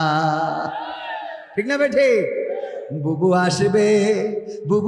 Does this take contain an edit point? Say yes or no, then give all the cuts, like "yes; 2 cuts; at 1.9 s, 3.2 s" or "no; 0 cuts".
no; 0 cuts